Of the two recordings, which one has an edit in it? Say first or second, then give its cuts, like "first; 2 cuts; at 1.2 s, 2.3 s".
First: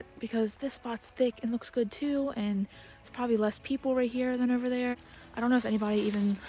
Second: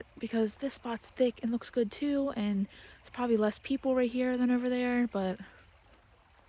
first; 1 cut; at 4.9 s